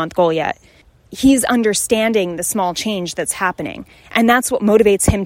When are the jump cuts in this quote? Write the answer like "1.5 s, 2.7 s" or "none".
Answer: 1.1 s